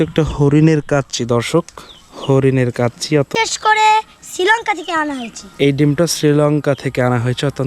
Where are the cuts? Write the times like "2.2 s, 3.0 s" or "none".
3.3 s